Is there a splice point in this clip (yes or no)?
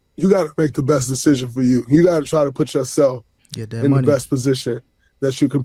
no